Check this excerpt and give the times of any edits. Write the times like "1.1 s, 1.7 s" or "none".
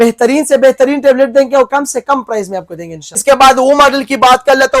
3.1 s